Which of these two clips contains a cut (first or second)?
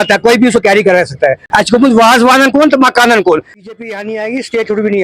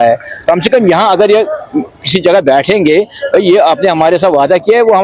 first